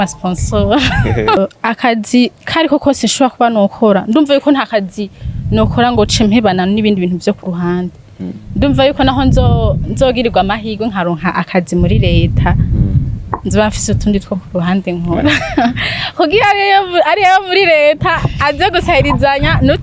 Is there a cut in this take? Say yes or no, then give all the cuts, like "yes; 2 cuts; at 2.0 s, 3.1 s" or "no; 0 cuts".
yes; 1 cut; at 1.4 s